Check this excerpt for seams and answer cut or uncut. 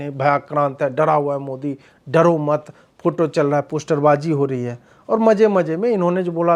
uncut